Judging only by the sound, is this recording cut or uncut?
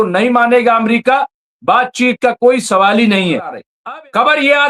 cut